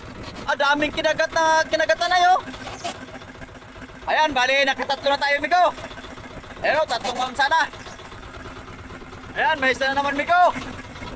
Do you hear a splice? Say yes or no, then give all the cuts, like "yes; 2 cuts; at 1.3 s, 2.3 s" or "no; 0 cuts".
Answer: yes; 1 cut; at 8.2 s